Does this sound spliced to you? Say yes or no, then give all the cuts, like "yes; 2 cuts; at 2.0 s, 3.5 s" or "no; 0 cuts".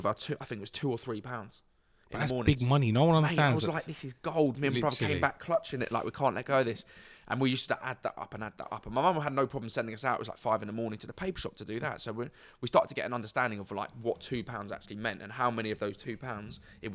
no; 0 cuts